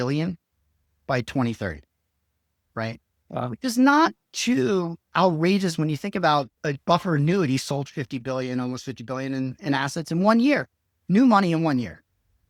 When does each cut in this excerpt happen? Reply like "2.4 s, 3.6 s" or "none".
none